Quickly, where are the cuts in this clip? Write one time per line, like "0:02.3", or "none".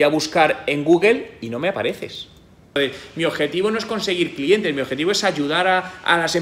0:02.6